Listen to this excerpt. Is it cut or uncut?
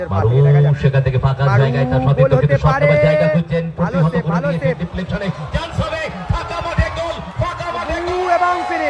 uncut